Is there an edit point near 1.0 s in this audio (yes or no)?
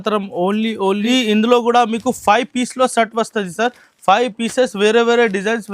yes